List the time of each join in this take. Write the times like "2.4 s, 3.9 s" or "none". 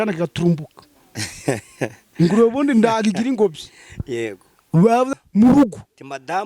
5.1 s